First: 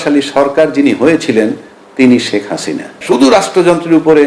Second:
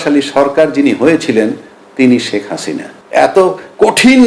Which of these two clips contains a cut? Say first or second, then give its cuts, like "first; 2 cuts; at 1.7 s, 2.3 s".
first; 1 cut; at 3.0 s